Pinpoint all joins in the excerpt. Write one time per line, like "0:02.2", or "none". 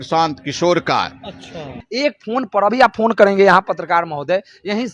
0:01.8